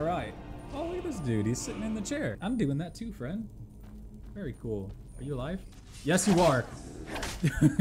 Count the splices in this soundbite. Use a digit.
1